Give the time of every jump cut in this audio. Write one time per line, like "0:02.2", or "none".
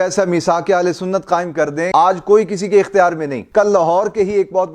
0:01.9
0:03.4